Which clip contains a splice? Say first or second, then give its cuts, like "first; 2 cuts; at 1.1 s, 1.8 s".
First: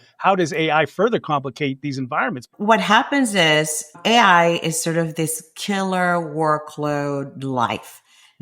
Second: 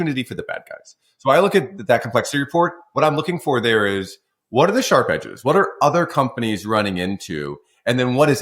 first; 2 cuts; at 2.5 s, 3.9 s